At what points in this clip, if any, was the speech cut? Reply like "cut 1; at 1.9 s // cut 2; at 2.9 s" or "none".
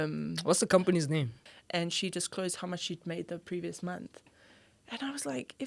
cut 1; at 1.5 s